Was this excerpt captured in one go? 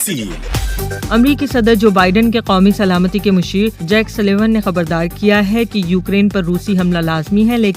yes; 0 cuts

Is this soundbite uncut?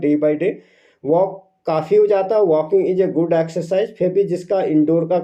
yes; 0 cuts

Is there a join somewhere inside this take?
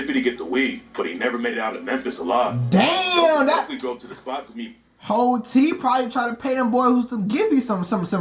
no; 0 cuts

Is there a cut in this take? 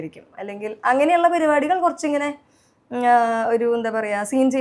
no; 0 cuts

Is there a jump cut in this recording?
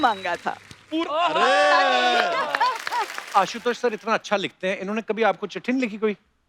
yes; 1 cut; at 3.2 s

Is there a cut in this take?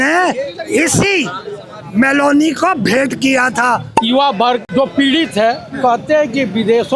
yes; 2 cuts; at 3.9 s, 4.7 s

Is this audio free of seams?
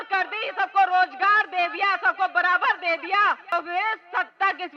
no; 1 cut; at 3.5 s

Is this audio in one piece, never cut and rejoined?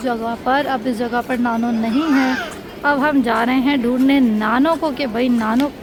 yes; 0 cuts

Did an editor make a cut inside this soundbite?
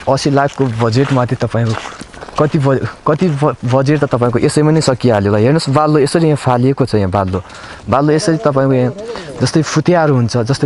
no; 0 cuts

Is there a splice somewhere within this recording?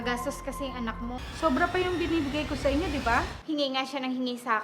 yes; 2 cuts; at 1.2 s, 3.4 s

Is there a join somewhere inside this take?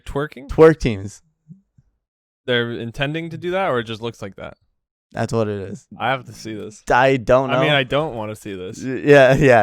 yes; 1 cut; at 5.9 s

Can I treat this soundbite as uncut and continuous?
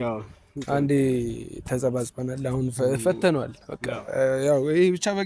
yes; 0 cuts

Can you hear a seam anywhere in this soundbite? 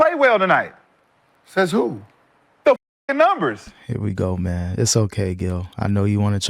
yes; 1 cut; at 3.7 s

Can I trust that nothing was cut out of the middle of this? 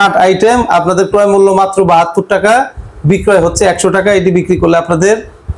yes; 0 cuts

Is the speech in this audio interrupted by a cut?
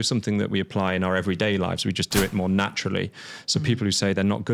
no; 0 cuts

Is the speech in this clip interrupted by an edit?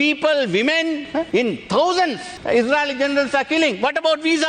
yes; 2 cuts; at 1.2 s, 2.3 s

